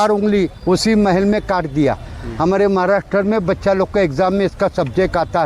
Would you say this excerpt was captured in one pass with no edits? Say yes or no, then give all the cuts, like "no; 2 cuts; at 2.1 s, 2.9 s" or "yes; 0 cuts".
yes; 0 cuts